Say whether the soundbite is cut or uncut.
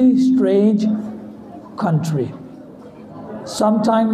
cut